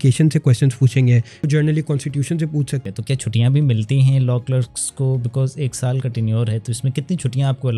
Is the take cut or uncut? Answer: cut